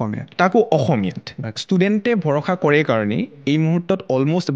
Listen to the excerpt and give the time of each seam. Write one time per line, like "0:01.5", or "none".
0:01.5